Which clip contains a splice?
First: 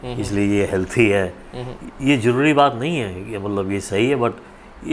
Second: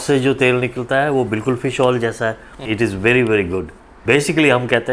second; 2 cuts; at 2.5 s, 3.7 s

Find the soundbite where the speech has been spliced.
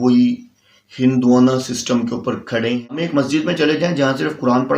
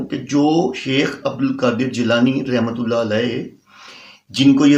first; 1 cut; at 3.3 s

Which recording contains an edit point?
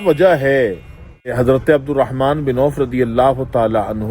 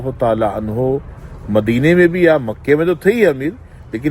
first; 1 cut; at 1.3 s

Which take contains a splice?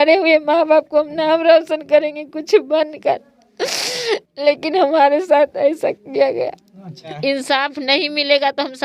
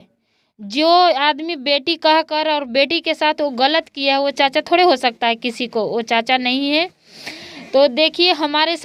first; 1 cut; at 7.2 s

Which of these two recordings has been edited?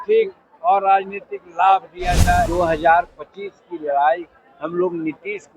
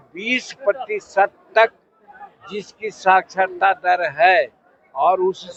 first; 1 cut; at 2.5 s

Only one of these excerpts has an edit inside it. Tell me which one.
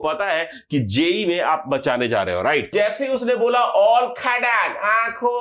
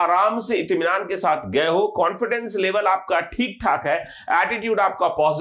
first; 1 cut; at 2.7 s

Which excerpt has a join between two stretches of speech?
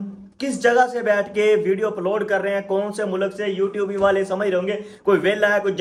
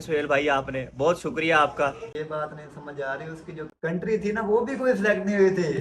second; 2 cuts; at 2.1 s, 3.6 s

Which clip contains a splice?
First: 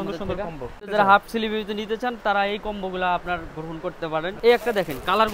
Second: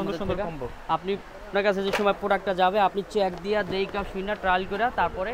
first; 2 cuts; at 0.8 s, 4.3 s

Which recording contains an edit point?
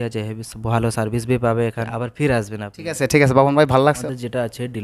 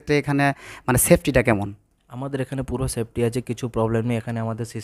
first; 2 cuts; at 1.9 s, 4.0 s

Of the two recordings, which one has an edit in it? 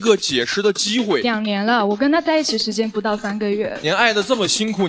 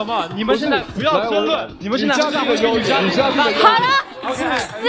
first; 2 cuts; at 1.2 s, 3.8 s

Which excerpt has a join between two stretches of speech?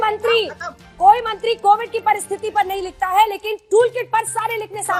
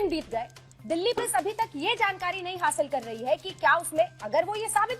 second; 1 cut; at 1.2 s

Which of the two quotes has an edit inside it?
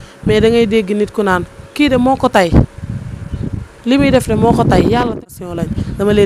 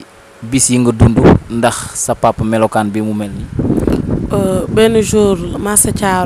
first; 1 cut; at 5.1 s

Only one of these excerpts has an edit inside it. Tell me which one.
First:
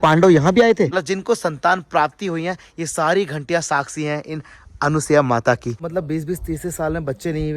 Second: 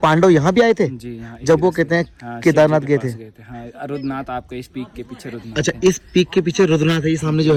first; 2 cuts; at 1.0 s, 5.8 s

